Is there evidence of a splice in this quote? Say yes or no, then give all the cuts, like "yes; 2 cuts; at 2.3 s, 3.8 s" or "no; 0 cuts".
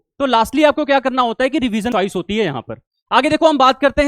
yes; 1 cut; at 1.9 s